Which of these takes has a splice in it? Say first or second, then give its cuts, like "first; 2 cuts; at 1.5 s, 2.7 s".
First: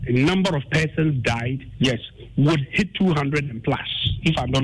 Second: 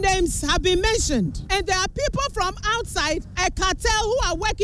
second; 2 cuts; at 1.4 s, 3.3 s